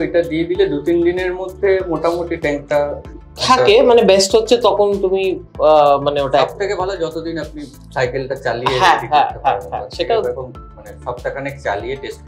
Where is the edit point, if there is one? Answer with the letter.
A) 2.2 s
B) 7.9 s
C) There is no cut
C